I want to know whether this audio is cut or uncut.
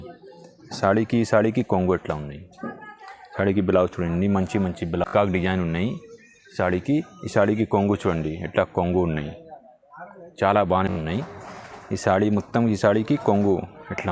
cut